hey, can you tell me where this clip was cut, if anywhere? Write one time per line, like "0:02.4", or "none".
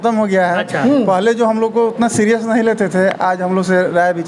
none